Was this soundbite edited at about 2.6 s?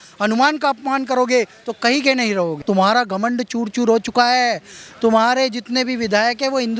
yes; 1 cut; at 2.6 s

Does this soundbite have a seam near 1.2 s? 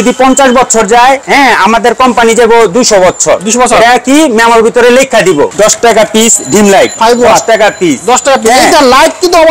yes; 3 cuts; at 1.2 s, 5.5 s, 6.9 s

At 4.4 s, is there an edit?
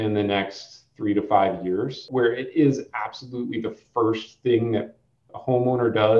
no; 1 cut; at 2.1 s

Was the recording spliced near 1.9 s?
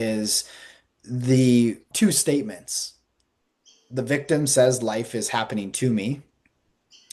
yes; 1 cut; at 1.9 s

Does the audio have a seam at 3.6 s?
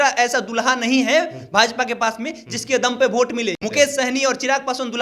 yes; 1 cut; at 3.6 s

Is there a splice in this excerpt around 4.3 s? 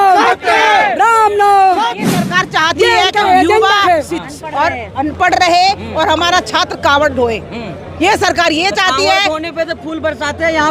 no; 1 cut; at 2.0 s

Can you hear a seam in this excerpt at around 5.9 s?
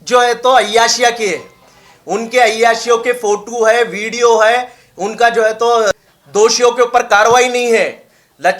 yes; 1 cut; at 5.9 s

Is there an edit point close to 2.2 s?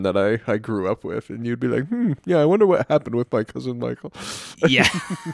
no; 0 cuts

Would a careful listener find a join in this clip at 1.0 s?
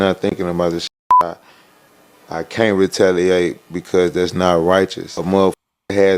no; 1 cut; at 5.1 s

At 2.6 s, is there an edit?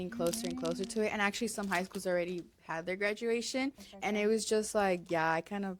no; 1 cut; at 3.9 s

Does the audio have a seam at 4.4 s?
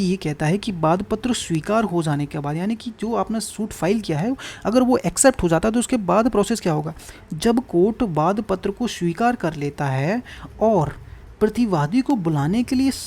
no; 0 cuts

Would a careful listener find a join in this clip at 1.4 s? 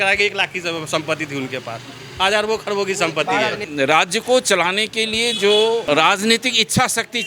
no; 2 cuts; at 3.6 s, 5.8 s

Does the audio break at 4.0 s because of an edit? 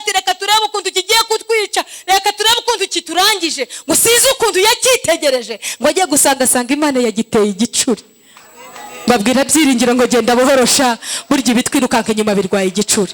no; 0 cuts

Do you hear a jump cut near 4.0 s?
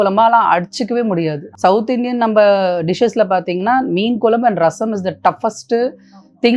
no; 1 cut; at 1.4 s

